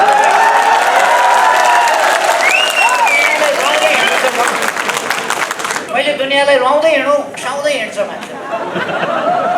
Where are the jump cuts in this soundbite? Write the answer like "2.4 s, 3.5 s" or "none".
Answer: 5.8 s, 7.4 s